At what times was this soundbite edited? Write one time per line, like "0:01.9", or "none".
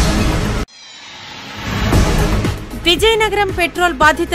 0:02.4

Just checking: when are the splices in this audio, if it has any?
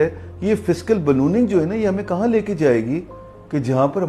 none

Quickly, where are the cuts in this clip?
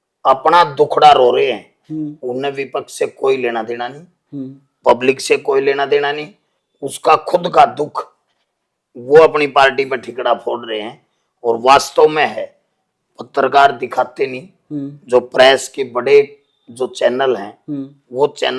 none

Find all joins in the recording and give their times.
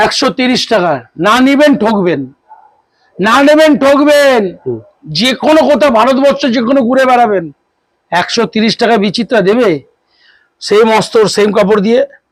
none

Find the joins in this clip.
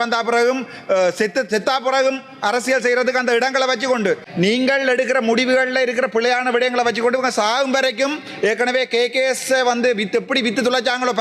0:04.3

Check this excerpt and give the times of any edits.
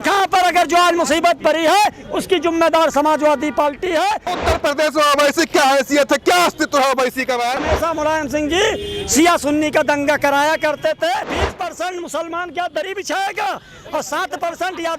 0:04.3
0:07.6
0:11.4

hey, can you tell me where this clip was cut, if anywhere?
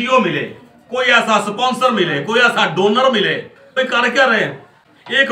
none

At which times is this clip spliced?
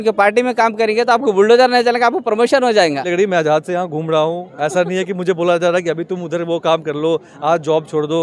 0:03.1

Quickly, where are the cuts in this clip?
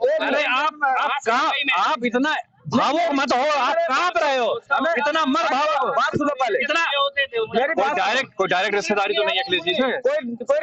none

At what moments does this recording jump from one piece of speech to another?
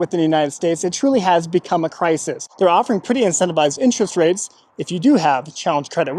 0:02.4

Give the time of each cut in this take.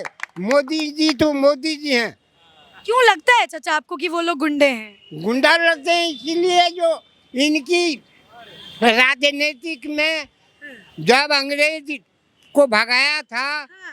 none

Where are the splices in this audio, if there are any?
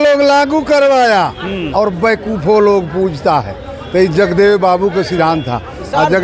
none

